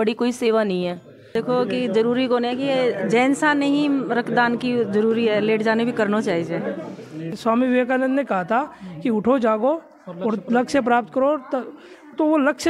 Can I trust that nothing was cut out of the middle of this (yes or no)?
no